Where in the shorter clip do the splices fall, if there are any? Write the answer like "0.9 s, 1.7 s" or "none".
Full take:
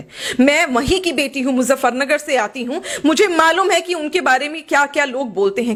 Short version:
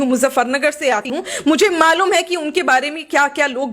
1.1 s